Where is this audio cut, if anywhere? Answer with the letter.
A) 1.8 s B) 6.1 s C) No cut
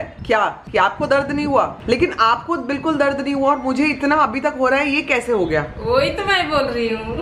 A